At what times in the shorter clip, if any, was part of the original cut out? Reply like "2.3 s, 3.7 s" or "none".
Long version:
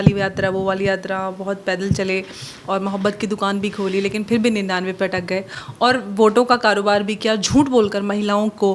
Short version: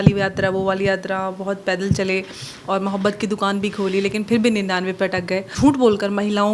5.5 s